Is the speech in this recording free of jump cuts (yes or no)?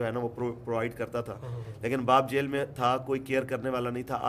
yes